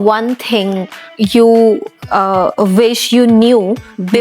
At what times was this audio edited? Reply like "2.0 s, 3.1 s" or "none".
none